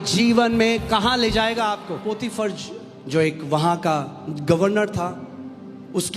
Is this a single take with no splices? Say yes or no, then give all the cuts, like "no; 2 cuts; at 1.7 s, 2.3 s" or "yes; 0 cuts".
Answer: no; 1 cut; at 2.1 s